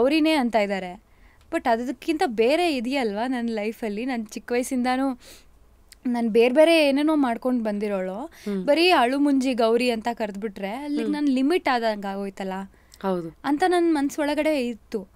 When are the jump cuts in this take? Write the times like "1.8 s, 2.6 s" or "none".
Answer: none